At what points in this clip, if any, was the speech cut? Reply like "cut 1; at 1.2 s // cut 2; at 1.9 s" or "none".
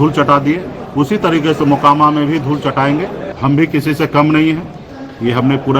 cut 1; at 3.2 s